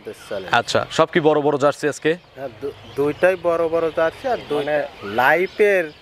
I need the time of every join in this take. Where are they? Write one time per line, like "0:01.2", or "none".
0:04.5